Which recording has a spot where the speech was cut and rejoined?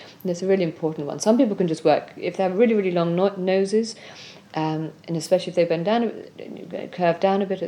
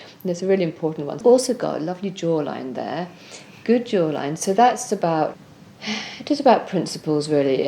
second; 2 cuts; at 1.2 s, 5.4 s

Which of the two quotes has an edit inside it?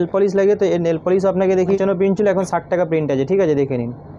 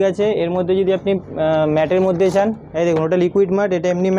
first; 1 cut; at 1.8 s

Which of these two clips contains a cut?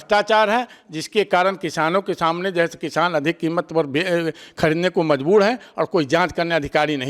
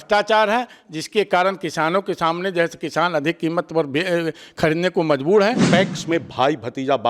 second; 1 cut; at 5.6 s

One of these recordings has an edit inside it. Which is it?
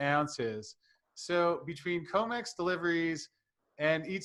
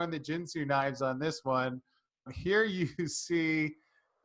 second; 1 cut; at 2.3 s

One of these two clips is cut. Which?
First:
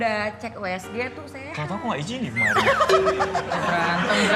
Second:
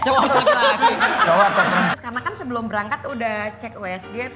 second; 1 cut; at 1.9 s

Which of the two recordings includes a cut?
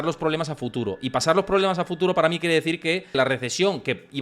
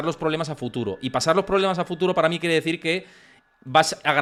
first; 1 cut; at 3.2 s

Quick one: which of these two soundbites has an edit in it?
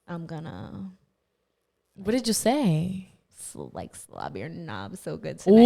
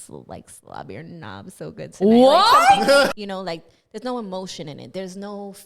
second; 1 cut; at 3.1 s

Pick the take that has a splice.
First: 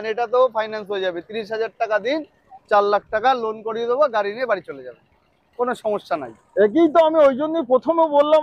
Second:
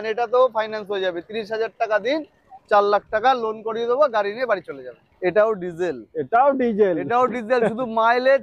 second; 1 cut; at 5.0 s

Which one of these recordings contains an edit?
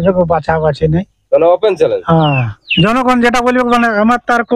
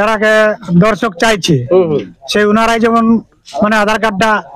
first; 1 cut; at 2.6 s

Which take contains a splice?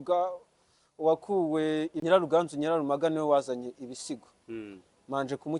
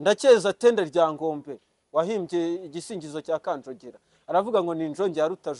first; 1 cut; at 2.0 s

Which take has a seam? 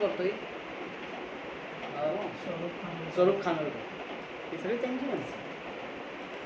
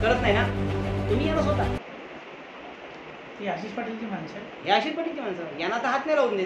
first; 1 cut; at 2.1 s

